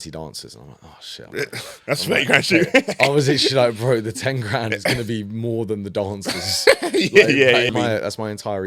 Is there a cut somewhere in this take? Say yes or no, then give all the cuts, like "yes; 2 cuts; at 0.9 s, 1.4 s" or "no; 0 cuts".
yes; 1 cut; at 7.7 s